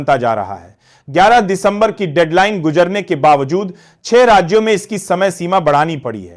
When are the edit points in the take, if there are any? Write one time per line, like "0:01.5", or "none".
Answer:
none